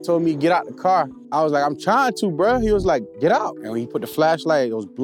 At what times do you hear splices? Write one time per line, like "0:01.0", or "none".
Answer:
0:01.2
0:03.6